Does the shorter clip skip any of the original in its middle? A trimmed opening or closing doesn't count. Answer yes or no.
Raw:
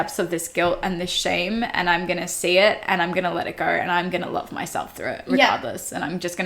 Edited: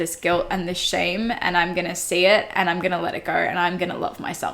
no